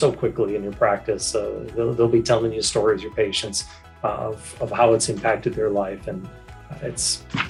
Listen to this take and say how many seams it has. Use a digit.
0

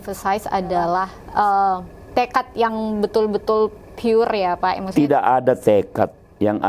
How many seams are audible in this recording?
1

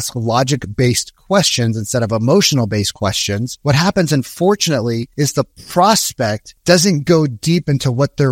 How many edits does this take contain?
3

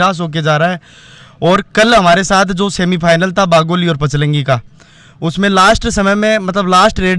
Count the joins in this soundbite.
0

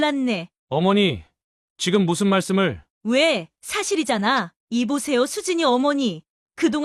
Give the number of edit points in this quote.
1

